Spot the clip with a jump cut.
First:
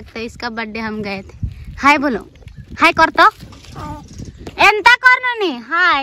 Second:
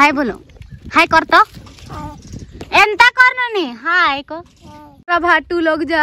second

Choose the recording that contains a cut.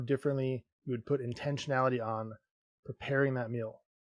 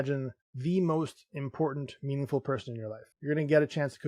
second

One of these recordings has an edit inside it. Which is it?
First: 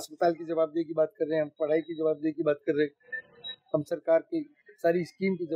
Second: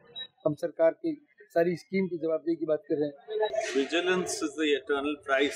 second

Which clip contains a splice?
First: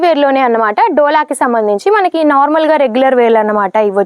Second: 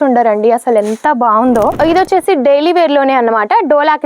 second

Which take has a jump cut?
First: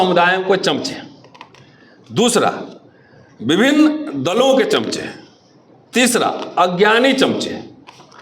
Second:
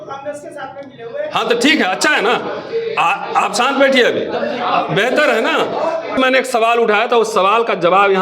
second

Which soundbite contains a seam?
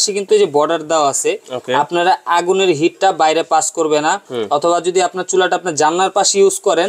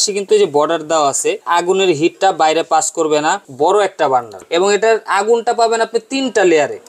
second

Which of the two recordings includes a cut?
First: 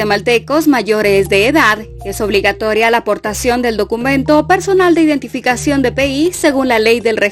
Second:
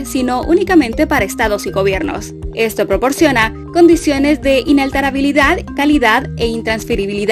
first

